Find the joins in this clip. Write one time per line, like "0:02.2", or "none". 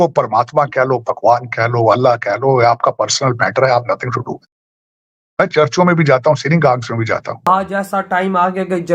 0:07.5